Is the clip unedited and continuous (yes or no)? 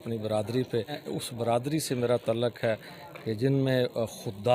no